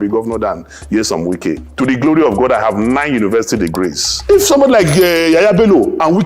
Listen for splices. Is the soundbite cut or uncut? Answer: cut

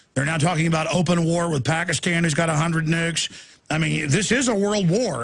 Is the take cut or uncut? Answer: cut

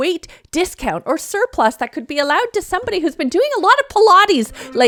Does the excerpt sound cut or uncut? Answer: uncut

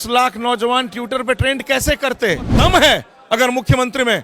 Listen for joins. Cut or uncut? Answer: cut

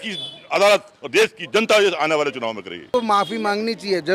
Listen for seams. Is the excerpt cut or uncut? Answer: cut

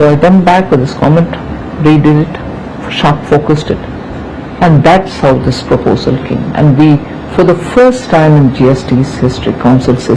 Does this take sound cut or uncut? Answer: cut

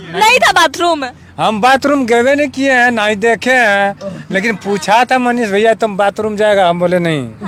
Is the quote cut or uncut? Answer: uncut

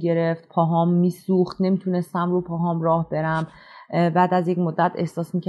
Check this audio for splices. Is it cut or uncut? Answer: uncut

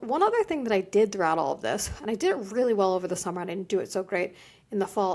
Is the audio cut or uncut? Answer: uncut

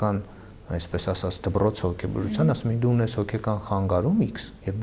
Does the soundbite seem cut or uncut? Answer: uncut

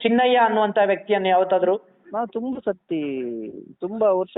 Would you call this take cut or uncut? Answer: uncut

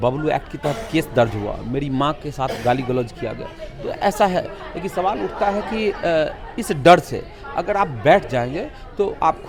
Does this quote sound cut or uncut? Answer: uncut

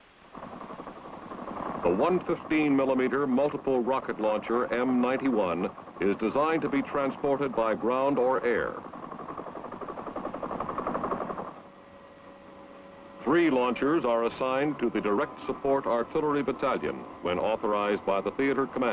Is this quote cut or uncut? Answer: cut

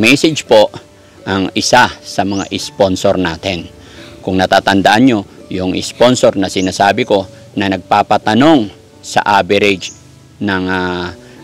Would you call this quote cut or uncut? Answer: uncut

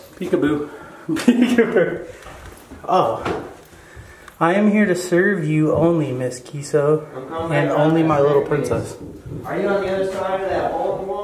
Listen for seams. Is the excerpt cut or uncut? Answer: uncut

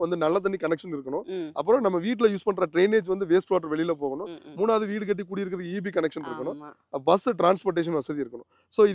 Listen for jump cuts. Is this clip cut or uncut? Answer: uncut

